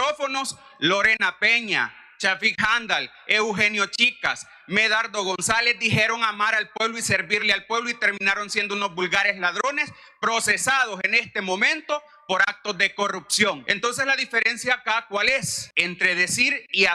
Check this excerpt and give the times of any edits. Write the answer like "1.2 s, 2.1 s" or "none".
13.7 s, 15.6 s